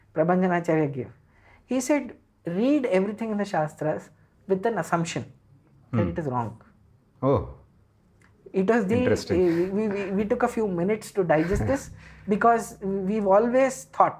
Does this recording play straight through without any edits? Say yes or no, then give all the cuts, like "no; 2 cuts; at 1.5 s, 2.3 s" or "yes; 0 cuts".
yes; 0 cuts